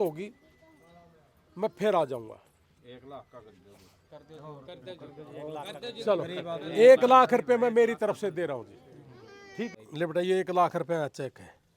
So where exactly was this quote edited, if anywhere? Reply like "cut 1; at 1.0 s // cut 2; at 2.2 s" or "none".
cut 1; at 9.7 s

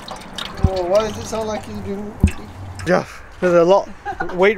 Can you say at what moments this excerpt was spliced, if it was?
cut 1; at 2.9 s

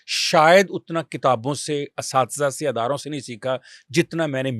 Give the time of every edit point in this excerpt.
none

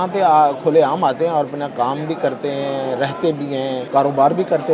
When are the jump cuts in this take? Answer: cut 1; at 3.8 s

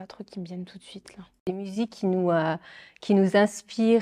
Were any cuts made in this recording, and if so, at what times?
cut 1; at 1.4 s

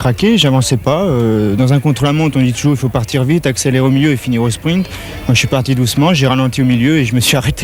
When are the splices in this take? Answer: none

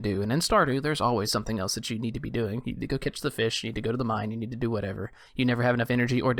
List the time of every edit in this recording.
none

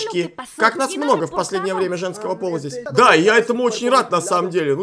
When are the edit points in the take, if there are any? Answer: cut 1; at 2.8 s

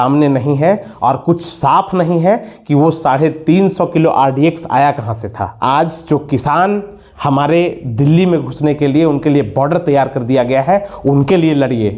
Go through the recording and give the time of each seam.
cut 1; at 5.5 s

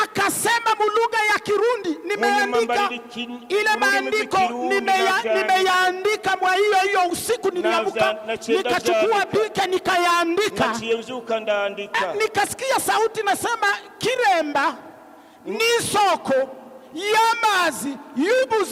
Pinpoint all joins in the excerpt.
none

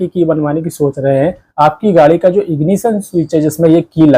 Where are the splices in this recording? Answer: cut 1; at 1.4 s

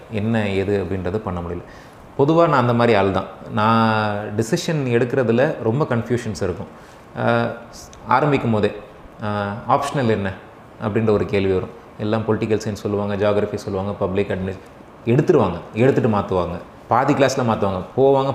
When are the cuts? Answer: none

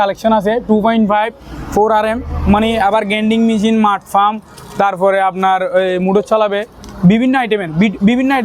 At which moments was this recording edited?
none

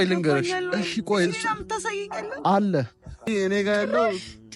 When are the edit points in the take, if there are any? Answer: cut 1; at 3.2 s

